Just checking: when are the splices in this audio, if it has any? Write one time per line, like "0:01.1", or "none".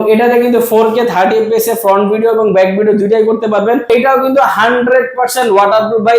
0:03.8